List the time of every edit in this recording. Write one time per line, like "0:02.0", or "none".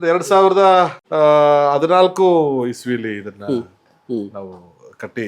0:01.0